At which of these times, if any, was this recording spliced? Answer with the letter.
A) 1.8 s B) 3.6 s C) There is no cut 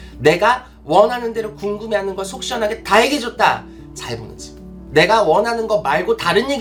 C